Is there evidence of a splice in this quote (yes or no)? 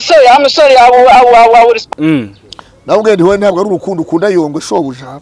yes